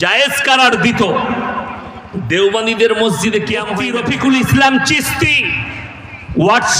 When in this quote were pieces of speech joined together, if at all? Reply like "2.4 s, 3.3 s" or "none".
3.7 s